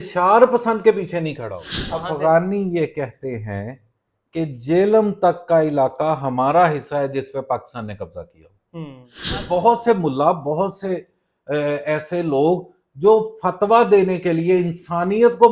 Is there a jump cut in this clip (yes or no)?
yes